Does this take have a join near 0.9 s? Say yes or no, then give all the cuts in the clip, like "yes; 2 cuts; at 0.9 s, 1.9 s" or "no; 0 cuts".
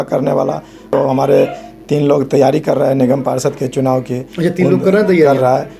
yes; 1 cut; at 0.9 s